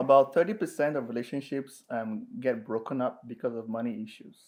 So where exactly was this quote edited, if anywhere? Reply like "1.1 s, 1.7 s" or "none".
none